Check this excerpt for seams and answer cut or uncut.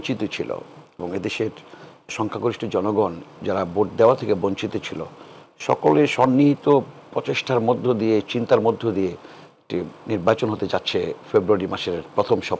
uncut